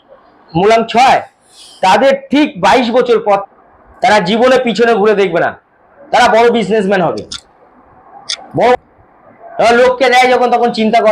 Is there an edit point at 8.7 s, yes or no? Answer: yes